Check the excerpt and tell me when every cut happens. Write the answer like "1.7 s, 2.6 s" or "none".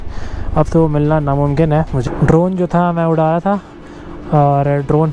2.0 s